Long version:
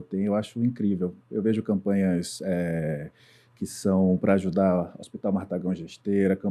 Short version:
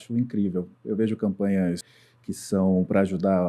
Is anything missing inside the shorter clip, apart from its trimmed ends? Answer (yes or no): yes